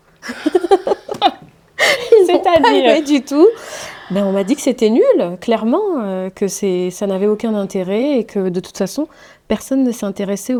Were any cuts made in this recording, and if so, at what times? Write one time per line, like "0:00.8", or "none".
none